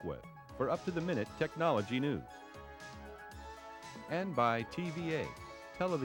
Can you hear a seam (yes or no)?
no